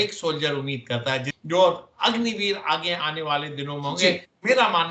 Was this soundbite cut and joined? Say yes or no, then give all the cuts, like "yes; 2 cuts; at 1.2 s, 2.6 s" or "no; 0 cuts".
yes; 1 cut; at 1.3 s